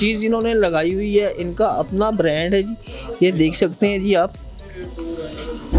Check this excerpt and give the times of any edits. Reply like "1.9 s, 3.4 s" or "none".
none